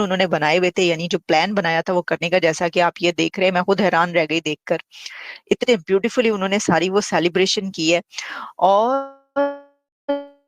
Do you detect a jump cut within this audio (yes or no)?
no